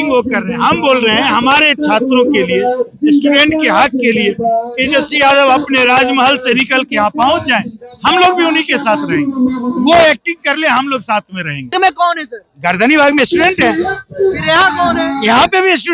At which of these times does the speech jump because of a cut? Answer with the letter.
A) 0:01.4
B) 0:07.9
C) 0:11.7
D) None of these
C